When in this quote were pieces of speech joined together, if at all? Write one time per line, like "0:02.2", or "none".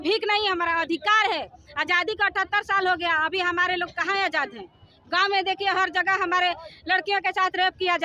none